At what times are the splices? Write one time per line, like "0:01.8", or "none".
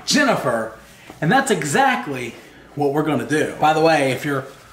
0:03.5